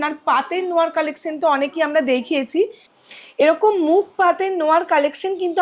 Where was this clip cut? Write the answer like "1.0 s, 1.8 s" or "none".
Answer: 3.0 s